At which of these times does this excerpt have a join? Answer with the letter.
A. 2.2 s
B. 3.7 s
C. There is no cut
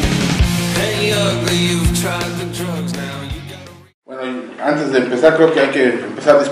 B